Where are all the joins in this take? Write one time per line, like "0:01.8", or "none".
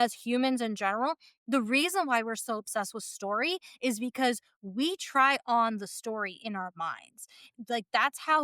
0:07.5

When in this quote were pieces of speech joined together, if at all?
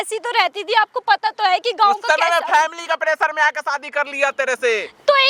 none

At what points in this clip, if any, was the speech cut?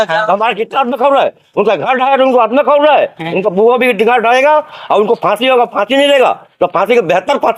none

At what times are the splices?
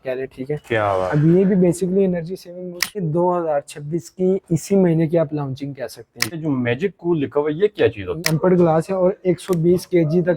0:03.0
0:06.4
0:08.1

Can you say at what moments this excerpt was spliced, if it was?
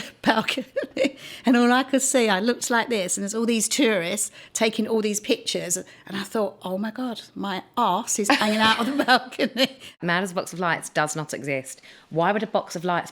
0:10.0

